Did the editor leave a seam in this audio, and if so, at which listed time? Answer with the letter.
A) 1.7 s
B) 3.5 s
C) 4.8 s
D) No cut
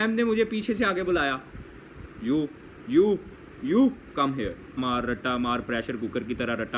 C